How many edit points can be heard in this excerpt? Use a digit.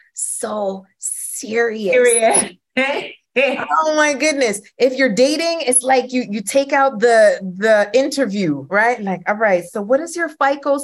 0